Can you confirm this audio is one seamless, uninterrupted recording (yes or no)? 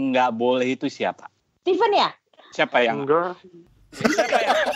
yes